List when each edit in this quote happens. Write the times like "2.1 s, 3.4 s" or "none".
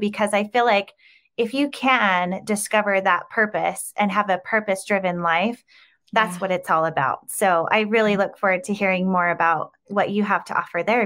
9.8 s